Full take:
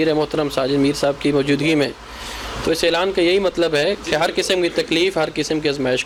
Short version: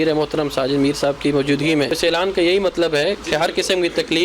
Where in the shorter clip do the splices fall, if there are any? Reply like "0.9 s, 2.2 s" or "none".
2.0 s